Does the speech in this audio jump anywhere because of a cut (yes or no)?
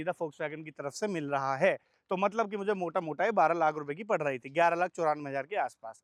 no